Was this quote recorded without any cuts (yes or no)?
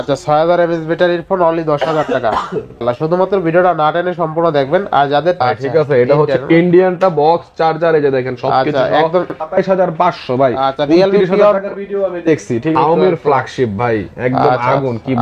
no